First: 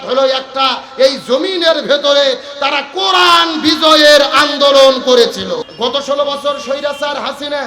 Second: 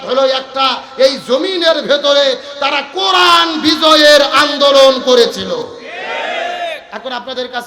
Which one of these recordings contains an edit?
first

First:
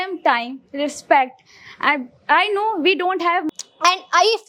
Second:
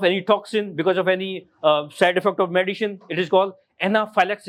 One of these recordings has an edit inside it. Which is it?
first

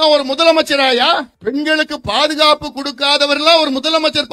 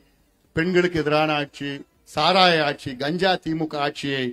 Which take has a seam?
first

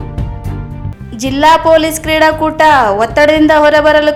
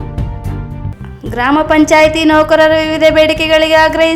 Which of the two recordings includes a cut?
second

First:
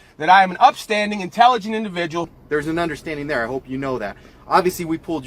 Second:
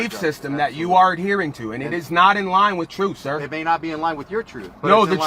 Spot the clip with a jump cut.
first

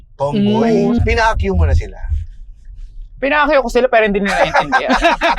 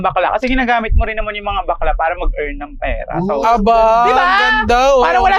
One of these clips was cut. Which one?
first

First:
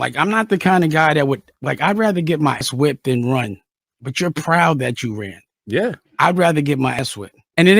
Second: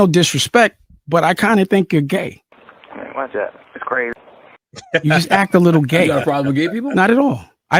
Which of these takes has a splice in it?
first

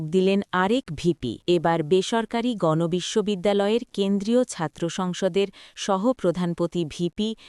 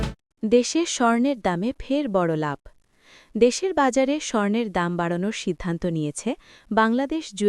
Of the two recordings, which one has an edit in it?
first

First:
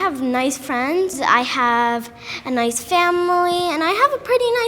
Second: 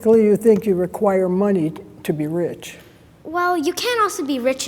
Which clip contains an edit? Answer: first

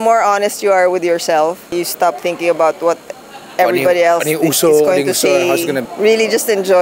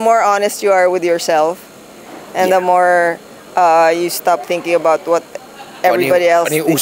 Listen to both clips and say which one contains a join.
first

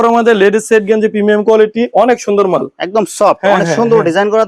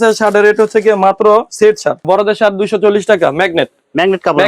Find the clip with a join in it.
second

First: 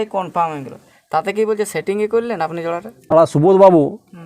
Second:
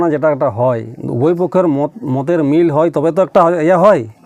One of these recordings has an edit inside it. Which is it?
first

